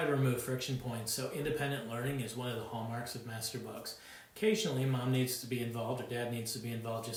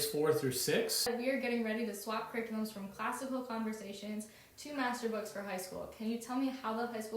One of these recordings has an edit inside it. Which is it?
second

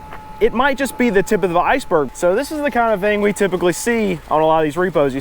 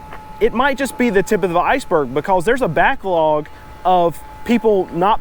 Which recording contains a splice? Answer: first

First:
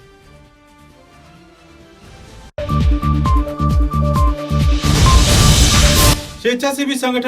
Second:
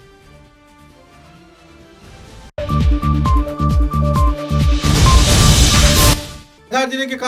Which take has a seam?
first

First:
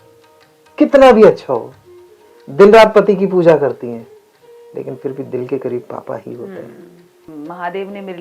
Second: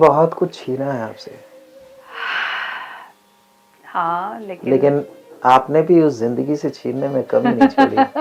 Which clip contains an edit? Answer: first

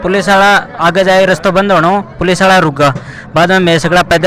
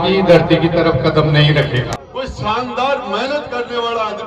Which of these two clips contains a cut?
second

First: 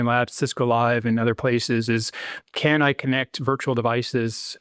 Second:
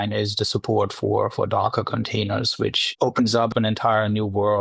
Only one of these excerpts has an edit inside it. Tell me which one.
second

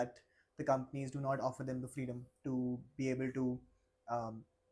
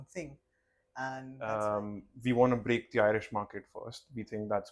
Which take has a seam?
second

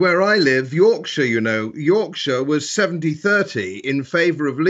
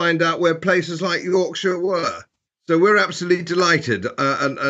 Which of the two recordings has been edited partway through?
first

